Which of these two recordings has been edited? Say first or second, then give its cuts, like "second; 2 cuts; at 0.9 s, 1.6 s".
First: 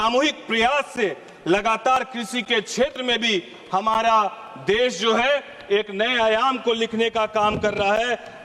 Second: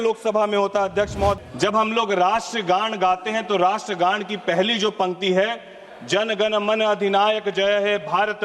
second; 1 cut; at 1.4 s